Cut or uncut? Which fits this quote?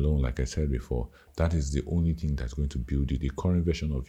cut